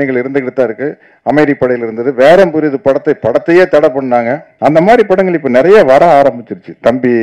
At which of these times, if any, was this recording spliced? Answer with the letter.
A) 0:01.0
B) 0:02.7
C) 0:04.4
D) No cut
C